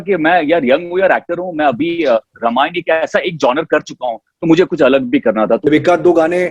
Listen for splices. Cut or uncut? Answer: cut